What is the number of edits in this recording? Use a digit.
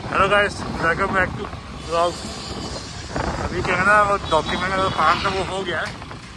0